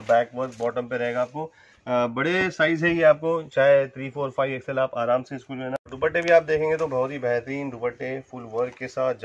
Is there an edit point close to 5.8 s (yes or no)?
yes